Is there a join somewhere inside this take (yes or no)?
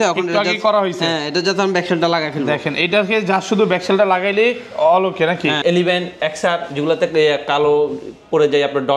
yes